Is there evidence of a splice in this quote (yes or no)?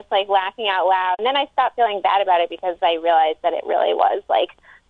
yes